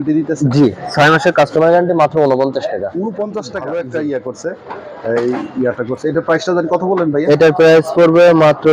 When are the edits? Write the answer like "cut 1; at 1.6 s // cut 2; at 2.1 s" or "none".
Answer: cut 1; at 3.5 s